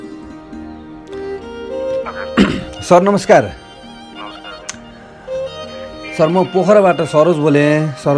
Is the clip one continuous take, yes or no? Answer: no